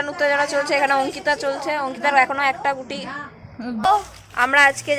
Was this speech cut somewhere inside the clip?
yes; 1 cut; at 3.8 s

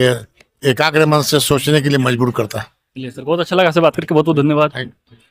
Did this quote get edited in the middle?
no; 0 cuts

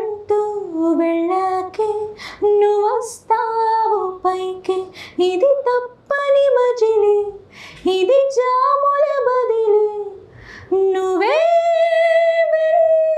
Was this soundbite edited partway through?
no; 0 cuts

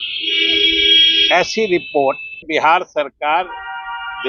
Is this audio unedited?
no; 1 cut; at 2.4 s

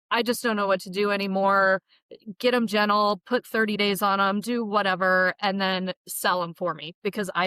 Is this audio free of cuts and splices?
yes; 0 cuts

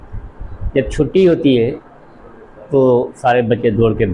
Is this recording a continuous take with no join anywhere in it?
yes; 0 cuts

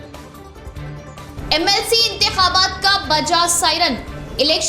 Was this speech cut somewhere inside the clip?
no; 0 cuts

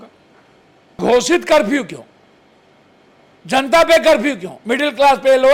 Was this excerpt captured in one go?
no; 1 cut; at 1.0 s

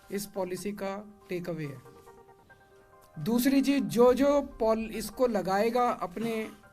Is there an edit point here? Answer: no; 0 cuts

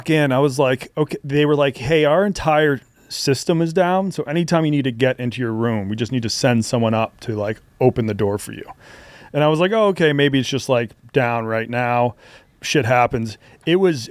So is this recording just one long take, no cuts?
yes; 0 cuts

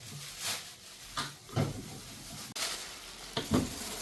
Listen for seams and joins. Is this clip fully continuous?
no; 1 cut; at 2.5 s

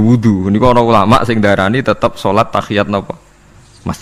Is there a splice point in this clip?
no; 0 cuts

